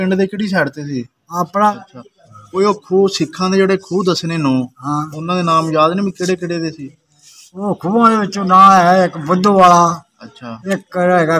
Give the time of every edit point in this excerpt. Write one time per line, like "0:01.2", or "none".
0:01.8